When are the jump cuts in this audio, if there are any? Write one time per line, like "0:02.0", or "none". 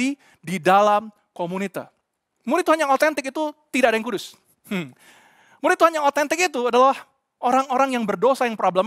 0:02.3